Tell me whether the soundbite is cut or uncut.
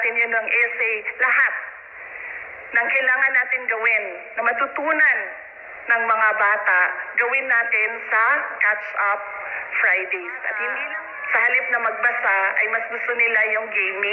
cut